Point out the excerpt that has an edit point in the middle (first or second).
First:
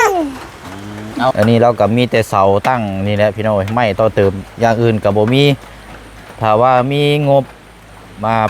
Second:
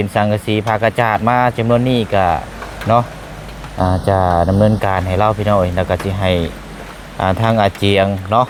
first